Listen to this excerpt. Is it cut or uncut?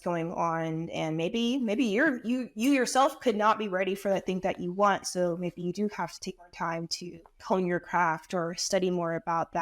cut